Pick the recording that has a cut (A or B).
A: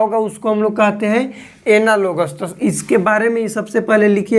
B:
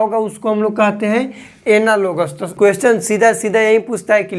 B